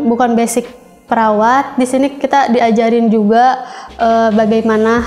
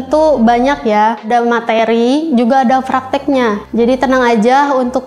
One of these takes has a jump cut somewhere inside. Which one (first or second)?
second